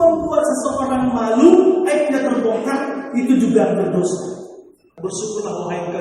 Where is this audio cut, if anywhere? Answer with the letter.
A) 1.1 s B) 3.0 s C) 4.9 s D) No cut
C